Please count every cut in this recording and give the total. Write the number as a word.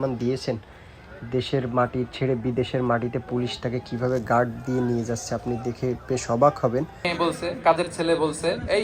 one